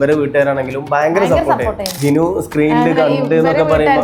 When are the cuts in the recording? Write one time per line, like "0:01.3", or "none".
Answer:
0:01.9